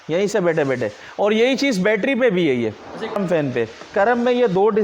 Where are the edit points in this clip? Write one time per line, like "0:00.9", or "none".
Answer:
0:03.2